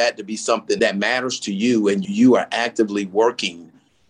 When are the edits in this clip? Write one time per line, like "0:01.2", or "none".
0:00.8
0:02.0